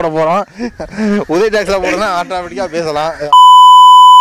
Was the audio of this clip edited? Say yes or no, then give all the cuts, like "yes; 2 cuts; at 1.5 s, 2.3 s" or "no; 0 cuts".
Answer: yes; 1 cut; at 3.2 s